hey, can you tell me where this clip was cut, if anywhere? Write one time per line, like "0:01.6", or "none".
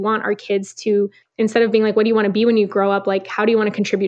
0:01.2